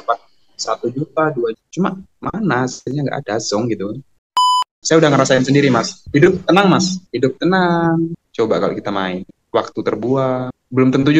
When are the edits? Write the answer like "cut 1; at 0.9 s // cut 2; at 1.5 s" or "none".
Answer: cut 1; at 4.6 s // cut 2; at 6.0 s // cut 3; at 7.0 s // cut 4; at 8.2 s